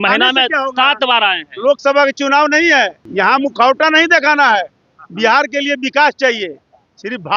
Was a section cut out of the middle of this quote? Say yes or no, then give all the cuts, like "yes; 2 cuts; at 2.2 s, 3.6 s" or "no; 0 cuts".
yes; 1 cut; at 3.0 s